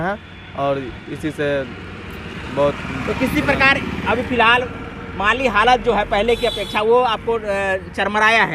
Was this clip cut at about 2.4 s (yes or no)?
no